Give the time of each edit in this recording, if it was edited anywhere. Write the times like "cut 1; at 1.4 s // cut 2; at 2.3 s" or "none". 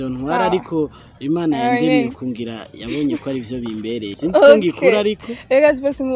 cut 1; at 4.1 s